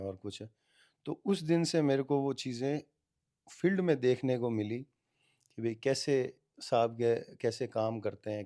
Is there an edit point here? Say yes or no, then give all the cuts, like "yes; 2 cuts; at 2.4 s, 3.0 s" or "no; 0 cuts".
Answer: no; 0 cuts